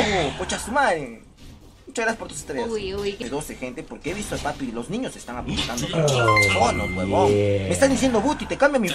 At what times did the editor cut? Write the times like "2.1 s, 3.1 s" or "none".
3.2 s